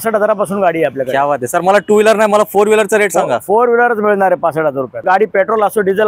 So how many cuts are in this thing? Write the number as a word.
one